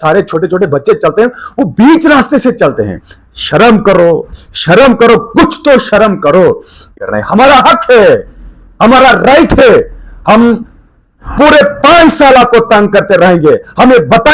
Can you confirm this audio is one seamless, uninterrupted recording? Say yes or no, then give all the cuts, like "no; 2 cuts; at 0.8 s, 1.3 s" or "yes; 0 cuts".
no; 1 cut; at 6.9 s